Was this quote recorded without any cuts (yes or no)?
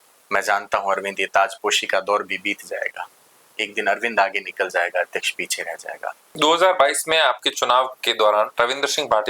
no